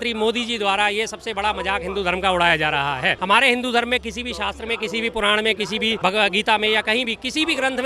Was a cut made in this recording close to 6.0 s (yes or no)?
yes